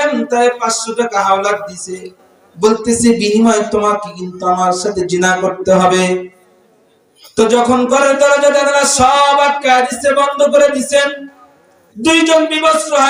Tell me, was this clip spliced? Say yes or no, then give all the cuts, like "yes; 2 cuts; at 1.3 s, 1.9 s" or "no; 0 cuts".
no; 0 cuts